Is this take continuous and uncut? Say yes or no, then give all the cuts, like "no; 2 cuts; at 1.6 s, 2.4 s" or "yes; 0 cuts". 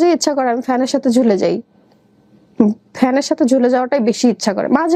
yes; 0 cuts